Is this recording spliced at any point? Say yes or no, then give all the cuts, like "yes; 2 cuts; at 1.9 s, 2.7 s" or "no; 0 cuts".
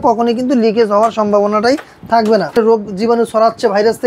yes; 1 cut; at 2.5 s